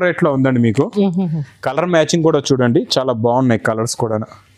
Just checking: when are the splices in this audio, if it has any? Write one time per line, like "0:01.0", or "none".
none